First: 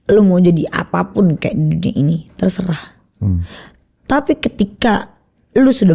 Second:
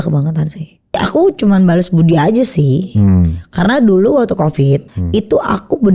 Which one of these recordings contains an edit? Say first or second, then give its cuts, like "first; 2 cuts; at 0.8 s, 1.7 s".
second; 2 cuts; at 1.0 s, 4.9 s